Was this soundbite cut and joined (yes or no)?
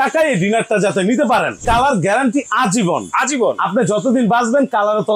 yes